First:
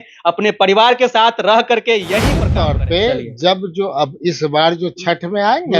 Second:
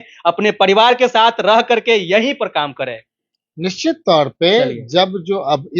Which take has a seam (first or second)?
first